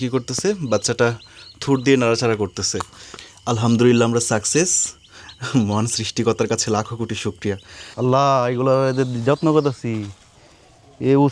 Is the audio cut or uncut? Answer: cut